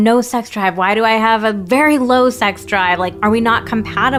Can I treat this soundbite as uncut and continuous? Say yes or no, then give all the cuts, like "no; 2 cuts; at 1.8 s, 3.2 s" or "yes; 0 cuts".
yes; 0 cuts